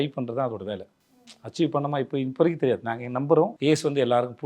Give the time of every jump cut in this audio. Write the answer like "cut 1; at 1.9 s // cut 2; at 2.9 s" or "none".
cut 1; at 3.5 s